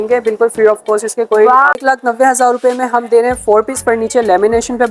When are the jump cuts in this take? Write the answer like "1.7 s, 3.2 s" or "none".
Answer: 1.7 s